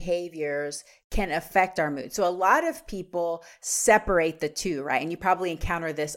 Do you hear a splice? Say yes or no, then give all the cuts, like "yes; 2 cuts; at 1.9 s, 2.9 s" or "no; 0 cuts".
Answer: no; 0 cuts